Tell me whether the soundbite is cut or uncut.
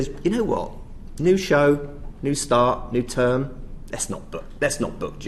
uncut